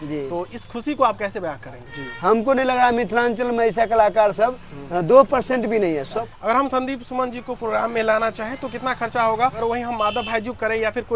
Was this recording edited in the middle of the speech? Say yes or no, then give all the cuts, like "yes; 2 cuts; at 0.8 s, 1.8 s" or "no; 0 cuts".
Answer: yes; 3 cuts; at 1.7 s, 6.1 s, 9.6 s